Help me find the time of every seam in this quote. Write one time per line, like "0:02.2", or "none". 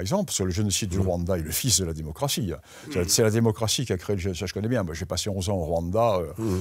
none